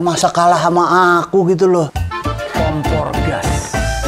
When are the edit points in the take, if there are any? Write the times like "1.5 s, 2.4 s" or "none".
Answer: 2.1 s